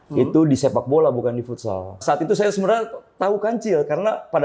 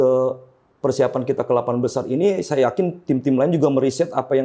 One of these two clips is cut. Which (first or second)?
first